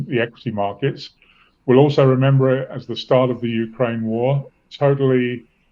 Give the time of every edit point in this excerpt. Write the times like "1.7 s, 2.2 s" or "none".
none